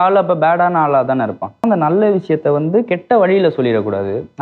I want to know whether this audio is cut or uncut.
cut